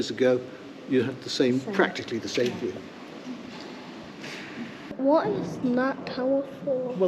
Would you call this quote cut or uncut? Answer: cut